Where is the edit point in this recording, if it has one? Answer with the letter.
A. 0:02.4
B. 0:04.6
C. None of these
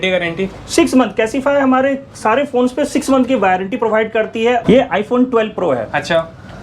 B